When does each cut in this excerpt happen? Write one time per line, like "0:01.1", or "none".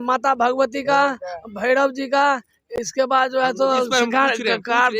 none